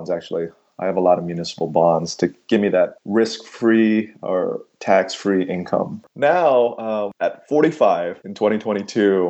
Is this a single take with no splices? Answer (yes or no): no